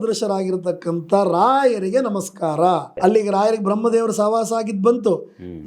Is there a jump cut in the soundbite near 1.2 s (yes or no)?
no